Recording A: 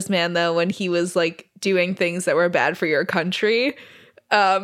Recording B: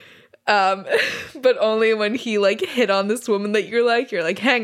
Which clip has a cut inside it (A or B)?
A